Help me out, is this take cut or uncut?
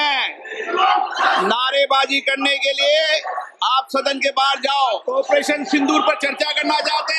cut